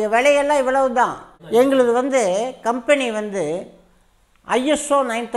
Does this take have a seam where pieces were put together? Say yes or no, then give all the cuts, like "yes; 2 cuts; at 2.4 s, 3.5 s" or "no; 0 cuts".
yes; 1 cut; at 1.3 s